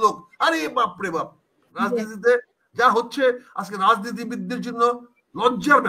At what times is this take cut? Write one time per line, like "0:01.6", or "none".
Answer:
0:01.7